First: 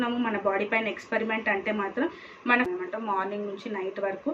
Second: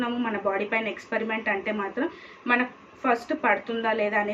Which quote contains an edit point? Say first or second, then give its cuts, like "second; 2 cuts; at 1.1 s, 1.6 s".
first; 1 cut; at 2.5 s